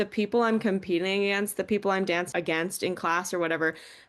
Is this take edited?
yes; 1 cut; at 2.3 s

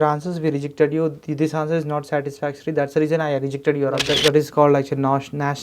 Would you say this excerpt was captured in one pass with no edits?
no; 1 cut; at 4.1 s

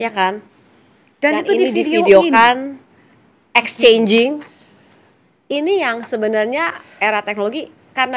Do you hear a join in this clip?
no; 0 cuts

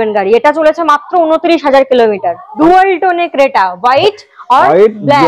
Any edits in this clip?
yes; 1 cut; at 2.4 s

